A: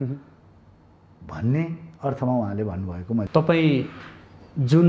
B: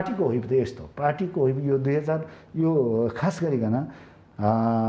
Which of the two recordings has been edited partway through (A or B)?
A